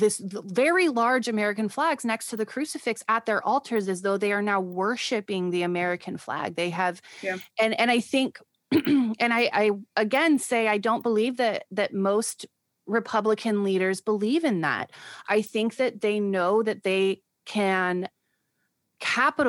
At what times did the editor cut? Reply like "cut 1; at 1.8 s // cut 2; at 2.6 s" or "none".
none